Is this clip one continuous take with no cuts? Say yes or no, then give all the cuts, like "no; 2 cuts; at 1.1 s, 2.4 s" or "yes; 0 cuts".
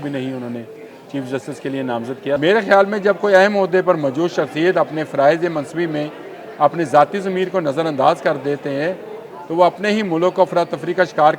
no; 1 cut; at 2.4 s